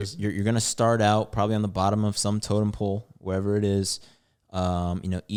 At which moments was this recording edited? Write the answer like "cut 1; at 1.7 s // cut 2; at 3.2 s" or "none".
none

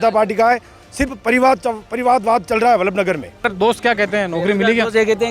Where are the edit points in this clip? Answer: cut 1; at 3.5 s

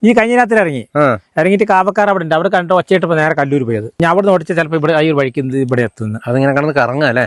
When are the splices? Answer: cut 1; at 3.9 s

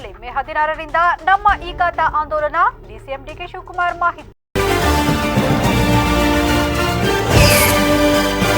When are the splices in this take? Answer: cut 1; at 4.3 s

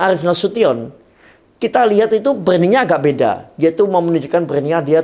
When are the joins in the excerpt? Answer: none

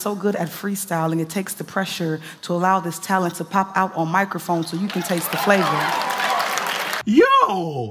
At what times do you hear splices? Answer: cut 1; at 7.0 s

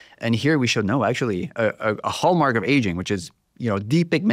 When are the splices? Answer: none

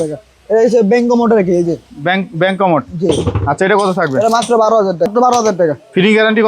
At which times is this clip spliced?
cut 1; at 5.1 s

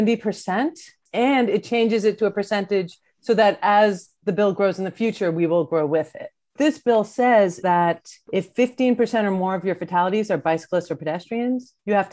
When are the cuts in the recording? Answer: cut 1; at 1.1 s // cut 2; at 6.5 s // cut 3; at 7.6 s

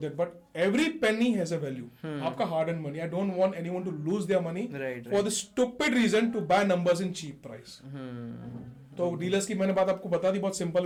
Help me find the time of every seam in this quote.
none

